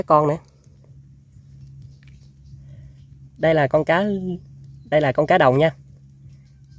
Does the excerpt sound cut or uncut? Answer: uncut